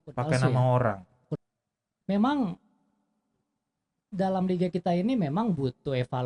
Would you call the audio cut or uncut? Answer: cut